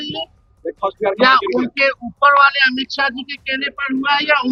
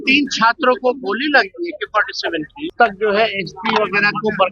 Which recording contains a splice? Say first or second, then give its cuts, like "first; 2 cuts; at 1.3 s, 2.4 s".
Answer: second; 1 cut; at 2.7 s